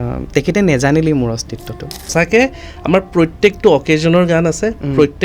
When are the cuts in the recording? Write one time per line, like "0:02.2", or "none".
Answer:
0:02.1